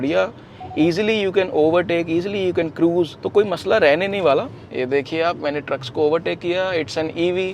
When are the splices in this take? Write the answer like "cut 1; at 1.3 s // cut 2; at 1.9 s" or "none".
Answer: cut 1; at 4.6 s